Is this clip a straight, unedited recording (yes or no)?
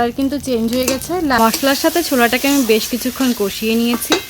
no